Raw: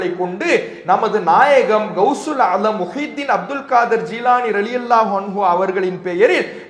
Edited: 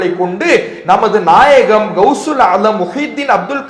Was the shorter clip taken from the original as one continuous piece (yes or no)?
yes